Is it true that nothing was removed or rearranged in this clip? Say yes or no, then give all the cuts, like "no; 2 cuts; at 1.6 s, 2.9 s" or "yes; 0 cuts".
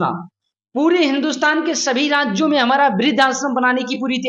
yes; 0 cuts